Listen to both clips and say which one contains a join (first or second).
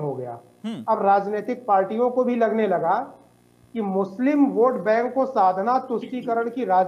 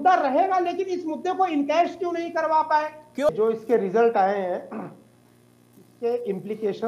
second